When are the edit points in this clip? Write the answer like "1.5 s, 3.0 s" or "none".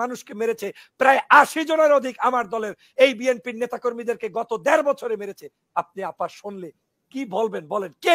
none